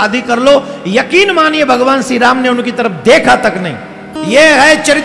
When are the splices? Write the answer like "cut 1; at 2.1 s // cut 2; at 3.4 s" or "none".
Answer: cut 1; at 4.1 s